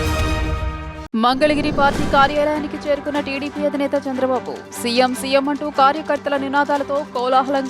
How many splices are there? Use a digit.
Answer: 1